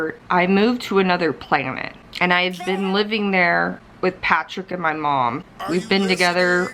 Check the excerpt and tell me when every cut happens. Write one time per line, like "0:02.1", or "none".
0:03.8
0:05.5

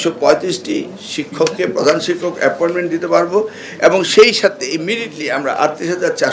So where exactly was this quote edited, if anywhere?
none

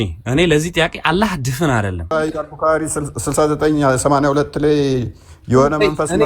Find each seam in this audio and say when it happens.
0:02.1

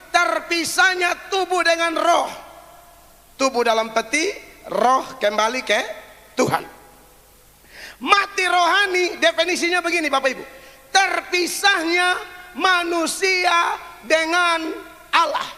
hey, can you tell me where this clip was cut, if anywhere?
none

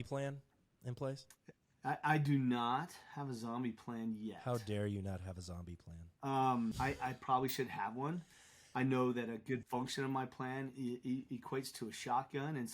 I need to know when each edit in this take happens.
0:06.8
0:09.6

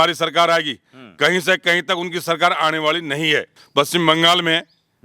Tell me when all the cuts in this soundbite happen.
0:03.6

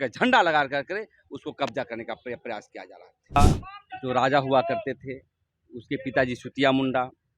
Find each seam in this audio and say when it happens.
0:03.4

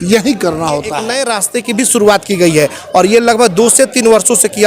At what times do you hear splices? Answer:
0:01.1

